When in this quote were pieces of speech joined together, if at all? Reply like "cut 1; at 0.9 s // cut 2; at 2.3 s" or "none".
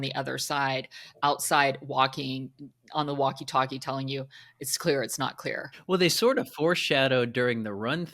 cut 1; at 5.9 s